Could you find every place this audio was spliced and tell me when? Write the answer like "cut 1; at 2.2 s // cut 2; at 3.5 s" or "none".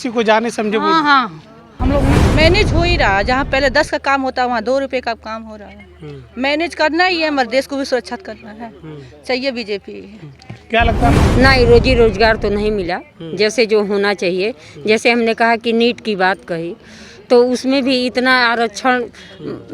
cut 1; at 2.1 s // cut 2; at 11.0 s

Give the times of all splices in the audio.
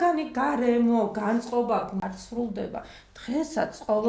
cut 1; at 1.9 s

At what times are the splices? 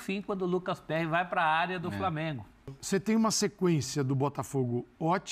cut 1; at 2.8 s

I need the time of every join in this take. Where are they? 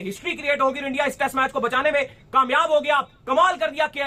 none

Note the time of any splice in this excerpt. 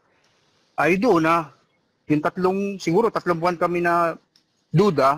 none

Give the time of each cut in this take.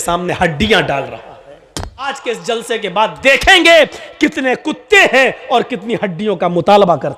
cut 1; at 2.1 s

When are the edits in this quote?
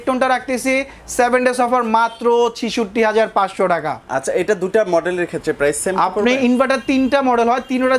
none

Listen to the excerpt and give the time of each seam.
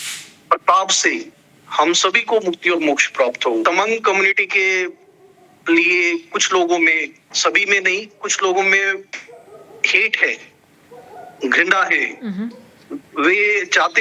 cut 1; at 3.6 s

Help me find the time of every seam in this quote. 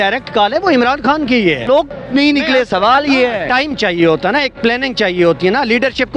cut 1; at 1.6 s

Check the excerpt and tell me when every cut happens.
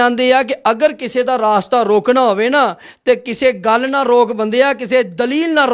none

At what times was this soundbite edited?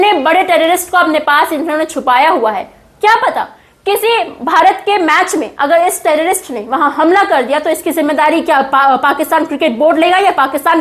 none

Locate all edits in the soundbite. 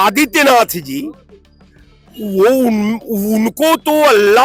none

